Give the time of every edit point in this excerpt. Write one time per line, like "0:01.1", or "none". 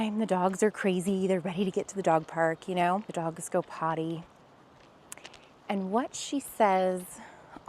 0:03.1